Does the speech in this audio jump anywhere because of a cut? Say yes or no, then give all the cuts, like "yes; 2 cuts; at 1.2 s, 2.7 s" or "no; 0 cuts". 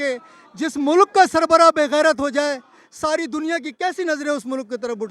no; 0 cuts